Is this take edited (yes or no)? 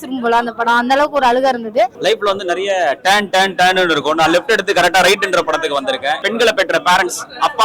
yes